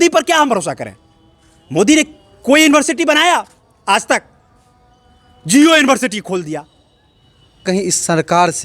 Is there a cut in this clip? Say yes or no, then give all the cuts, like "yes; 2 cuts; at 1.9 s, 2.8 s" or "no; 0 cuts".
yes; 1 cut; at 7.6 s